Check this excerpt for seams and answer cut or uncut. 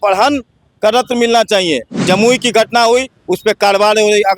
cut